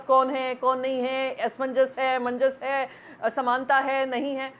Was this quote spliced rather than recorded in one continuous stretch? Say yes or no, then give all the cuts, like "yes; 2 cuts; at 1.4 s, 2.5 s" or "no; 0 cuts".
no; 0 cuts